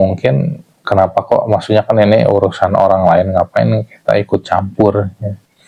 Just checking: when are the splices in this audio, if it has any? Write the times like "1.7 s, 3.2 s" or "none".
none